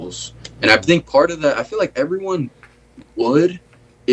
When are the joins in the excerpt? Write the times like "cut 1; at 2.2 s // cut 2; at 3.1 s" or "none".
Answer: none